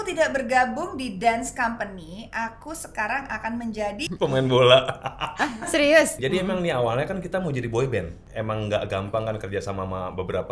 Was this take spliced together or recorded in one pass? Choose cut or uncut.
cut